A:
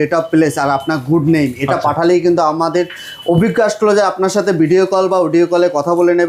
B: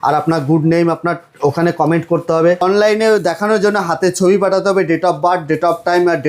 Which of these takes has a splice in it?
B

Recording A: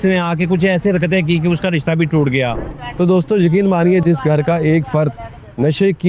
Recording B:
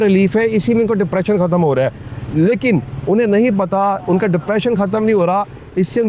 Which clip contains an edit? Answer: A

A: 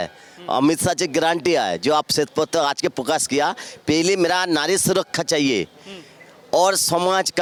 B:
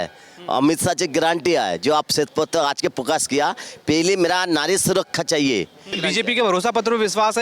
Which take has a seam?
B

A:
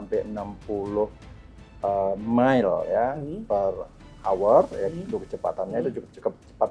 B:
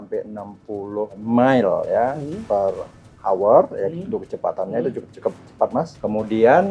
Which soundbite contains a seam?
B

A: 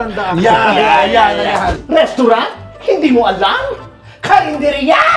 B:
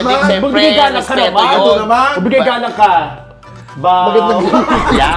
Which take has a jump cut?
A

